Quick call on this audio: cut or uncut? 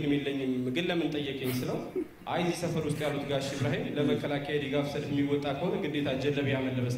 uncut